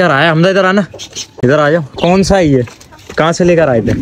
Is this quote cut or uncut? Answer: uncut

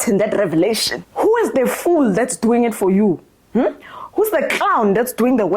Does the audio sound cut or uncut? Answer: cut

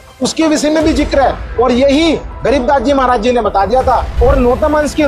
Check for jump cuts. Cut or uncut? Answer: cut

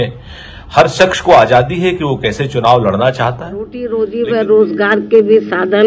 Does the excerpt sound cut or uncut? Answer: cut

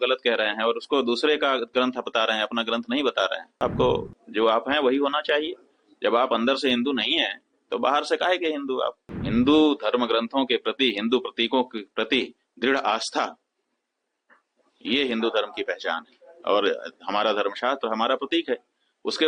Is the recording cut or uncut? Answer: cut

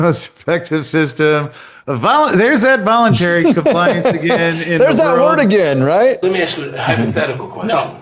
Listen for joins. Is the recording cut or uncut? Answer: cut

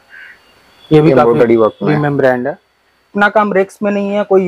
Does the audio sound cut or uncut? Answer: cut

